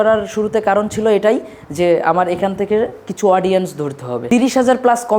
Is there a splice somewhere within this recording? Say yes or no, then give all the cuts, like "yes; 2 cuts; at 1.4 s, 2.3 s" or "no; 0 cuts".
yes; 1 cut; at 4.1 s